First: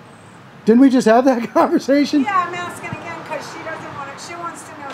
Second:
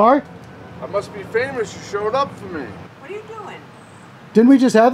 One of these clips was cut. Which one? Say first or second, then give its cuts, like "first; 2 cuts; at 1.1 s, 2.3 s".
second; 1 cut; at 2.7 s